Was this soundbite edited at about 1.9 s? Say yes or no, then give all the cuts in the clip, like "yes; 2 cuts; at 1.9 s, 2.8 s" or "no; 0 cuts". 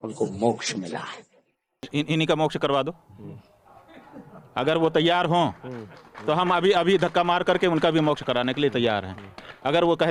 yes; 1 cut; at 1.9 s